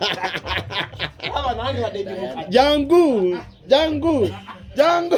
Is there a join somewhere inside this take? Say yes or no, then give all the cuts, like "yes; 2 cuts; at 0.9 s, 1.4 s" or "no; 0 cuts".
no; 0 cuts